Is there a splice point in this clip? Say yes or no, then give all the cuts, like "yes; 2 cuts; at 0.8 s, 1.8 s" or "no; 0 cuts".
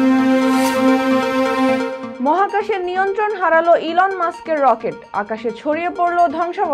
yes; 1 cut; at 2.0 s